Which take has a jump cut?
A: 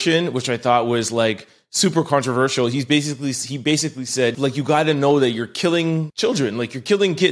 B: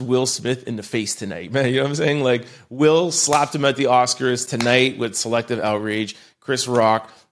A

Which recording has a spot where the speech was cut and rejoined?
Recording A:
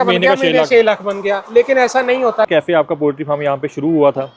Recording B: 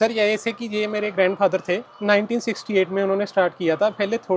A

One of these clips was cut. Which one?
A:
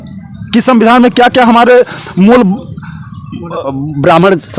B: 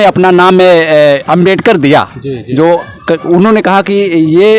A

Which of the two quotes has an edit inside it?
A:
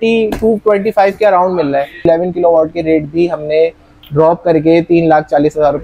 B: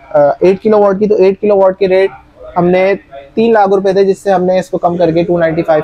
A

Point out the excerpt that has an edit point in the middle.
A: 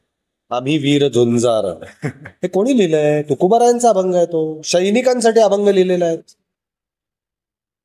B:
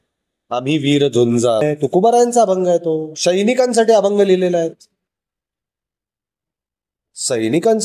B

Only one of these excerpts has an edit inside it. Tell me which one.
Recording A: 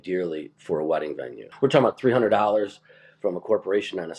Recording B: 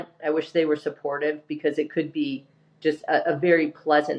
A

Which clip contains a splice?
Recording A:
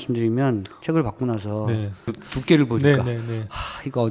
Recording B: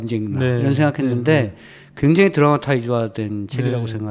A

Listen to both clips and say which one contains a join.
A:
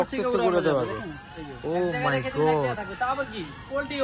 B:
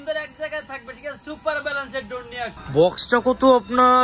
B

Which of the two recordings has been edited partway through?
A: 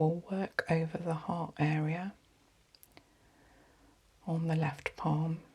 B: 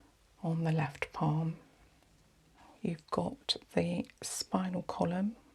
B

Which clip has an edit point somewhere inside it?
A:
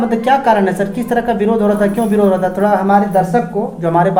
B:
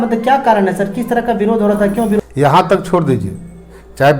B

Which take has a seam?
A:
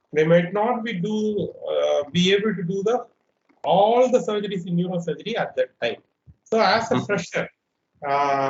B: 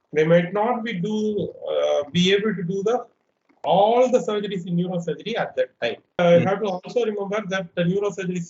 B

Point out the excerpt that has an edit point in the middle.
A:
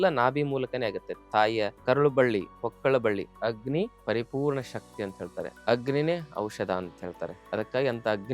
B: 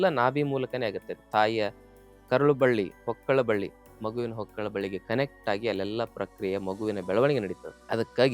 A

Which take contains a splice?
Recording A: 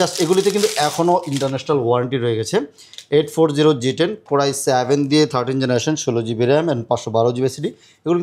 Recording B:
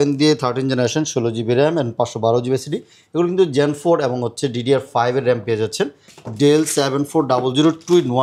B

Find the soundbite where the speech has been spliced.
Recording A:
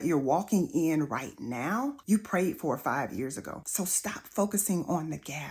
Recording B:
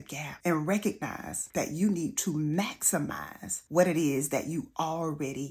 A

